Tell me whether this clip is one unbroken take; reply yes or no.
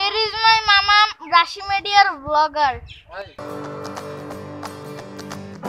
yes